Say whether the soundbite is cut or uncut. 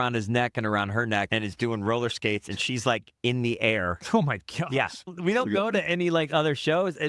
cut